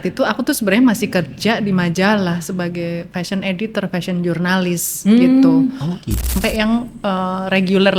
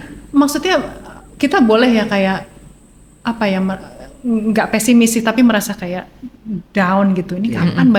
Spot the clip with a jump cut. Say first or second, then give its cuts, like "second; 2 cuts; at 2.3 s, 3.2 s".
first; 1 cut; at 6.3 s